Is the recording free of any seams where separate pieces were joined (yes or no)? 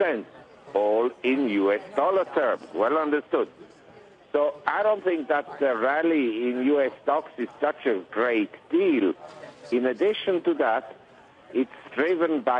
yes